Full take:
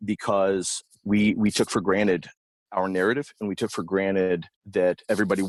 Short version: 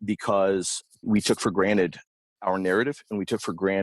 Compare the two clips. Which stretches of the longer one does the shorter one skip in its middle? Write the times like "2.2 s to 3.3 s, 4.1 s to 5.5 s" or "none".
1.1 s to 1.4 s